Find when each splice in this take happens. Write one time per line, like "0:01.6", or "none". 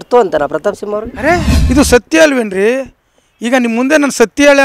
0:01.5